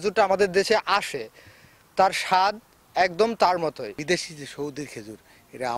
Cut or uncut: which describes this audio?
cut